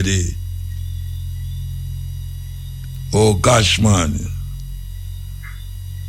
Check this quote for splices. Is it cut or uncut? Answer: uncut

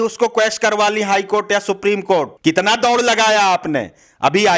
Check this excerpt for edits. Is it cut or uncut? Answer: uncut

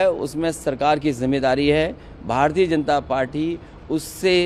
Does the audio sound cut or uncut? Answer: uncut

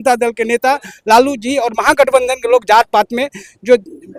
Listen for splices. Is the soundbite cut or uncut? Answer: uncut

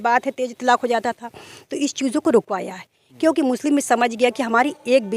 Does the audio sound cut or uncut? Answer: uncut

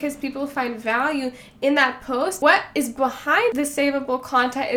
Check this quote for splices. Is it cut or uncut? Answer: cut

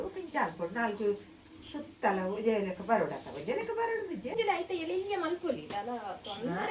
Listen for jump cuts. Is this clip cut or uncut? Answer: cut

